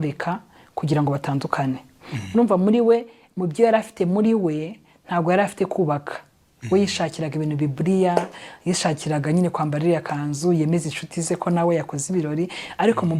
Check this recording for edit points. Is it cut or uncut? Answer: uncut